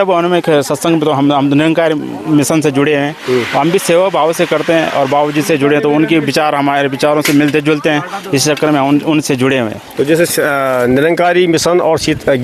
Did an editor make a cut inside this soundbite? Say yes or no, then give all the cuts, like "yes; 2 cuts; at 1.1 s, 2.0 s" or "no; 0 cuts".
no; 0 cuts